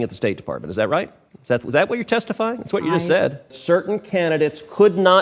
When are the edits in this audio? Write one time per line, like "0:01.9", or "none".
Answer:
0:03.5